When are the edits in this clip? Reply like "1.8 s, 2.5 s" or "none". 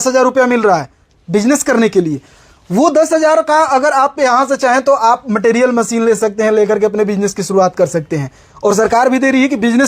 none